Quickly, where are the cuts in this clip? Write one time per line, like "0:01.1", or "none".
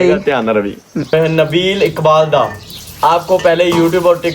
0:01.1